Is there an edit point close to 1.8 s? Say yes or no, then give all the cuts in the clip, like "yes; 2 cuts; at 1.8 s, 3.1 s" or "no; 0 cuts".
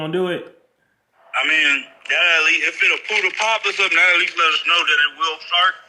no; 0 cuts